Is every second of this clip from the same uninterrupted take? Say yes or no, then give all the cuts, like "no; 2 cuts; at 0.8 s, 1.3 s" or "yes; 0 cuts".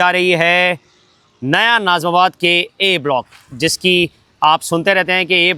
yes; 0 cuts